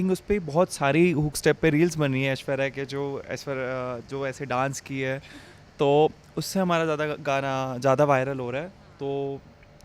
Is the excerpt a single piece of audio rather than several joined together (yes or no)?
yes